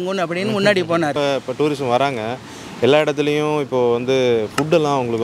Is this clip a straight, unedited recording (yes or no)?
no